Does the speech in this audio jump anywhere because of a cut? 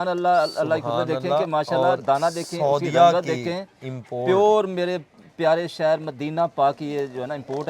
no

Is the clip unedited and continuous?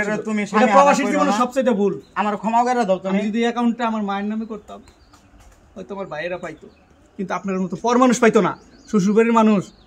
yes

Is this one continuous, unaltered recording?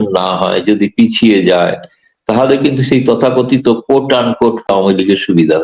no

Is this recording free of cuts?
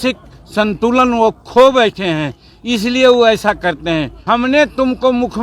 no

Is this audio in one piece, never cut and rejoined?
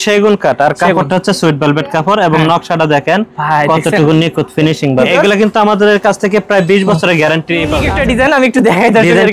no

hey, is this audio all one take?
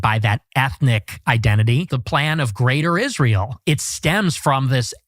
no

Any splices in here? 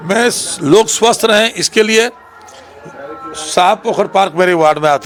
no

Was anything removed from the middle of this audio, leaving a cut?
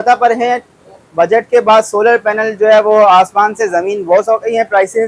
no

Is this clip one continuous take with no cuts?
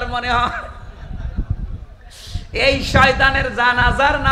yes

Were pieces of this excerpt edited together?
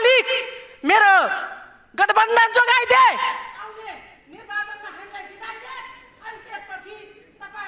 no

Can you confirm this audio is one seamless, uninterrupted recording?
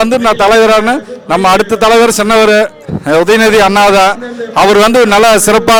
yes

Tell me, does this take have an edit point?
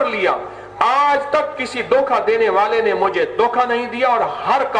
no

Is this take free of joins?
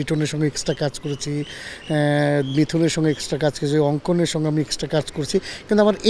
yes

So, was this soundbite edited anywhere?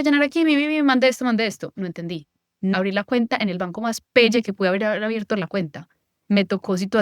yes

